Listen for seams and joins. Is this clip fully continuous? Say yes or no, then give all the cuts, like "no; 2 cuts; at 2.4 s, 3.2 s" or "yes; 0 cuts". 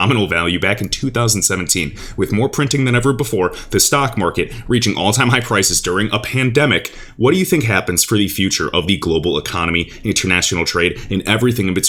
yes; 0 cuts